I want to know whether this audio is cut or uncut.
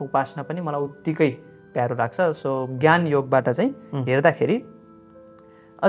uncut